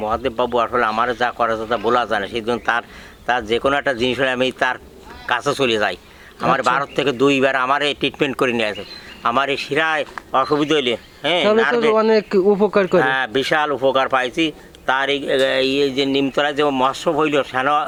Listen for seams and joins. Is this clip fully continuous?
yes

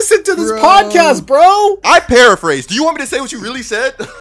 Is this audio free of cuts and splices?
no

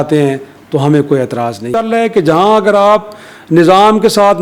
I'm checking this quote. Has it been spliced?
yes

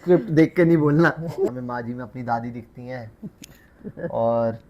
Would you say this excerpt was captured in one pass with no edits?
no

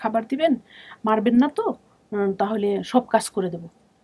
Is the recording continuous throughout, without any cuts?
yes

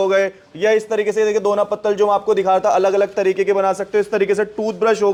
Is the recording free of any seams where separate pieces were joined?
yes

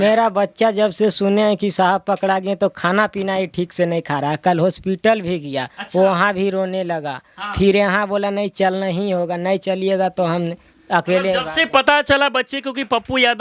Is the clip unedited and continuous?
yes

